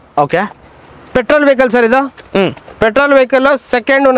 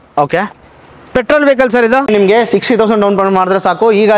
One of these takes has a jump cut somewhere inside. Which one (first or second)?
second